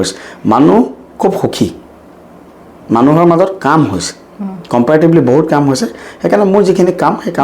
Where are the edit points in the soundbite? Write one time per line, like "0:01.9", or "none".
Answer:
none

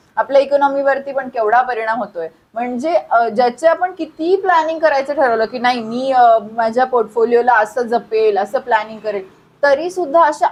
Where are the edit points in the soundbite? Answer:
none

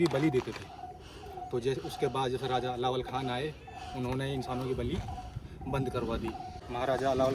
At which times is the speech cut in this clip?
none

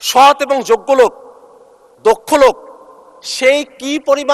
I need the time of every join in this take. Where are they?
none

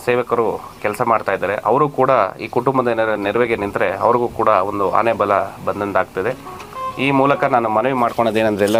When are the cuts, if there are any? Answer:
none

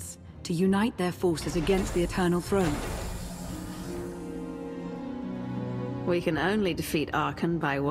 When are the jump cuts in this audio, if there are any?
0:03.8

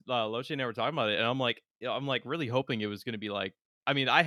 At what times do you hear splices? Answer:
none

